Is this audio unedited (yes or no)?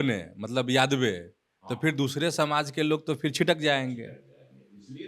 yes